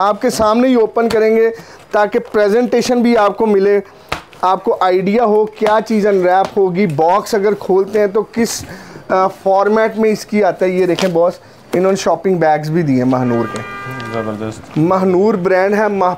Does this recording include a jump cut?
no; 0 cuts

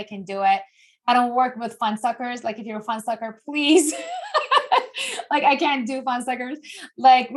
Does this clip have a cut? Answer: no; 0 cuts

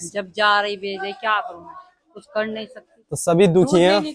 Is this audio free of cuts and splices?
yes; 0 cuts

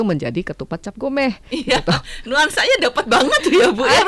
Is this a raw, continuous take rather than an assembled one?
yes; 0 cuts

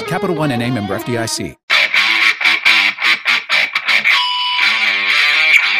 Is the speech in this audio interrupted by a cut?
yes; 1 cut; at 1.6 s

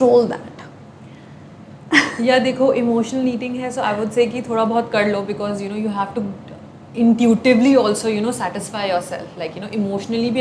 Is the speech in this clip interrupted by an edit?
no; 0 cuts

